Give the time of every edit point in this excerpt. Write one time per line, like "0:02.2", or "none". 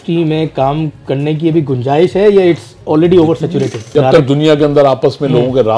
0:03.9